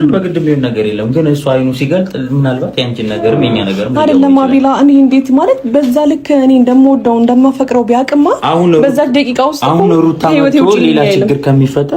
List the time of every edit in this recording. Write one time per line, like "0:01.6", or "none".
none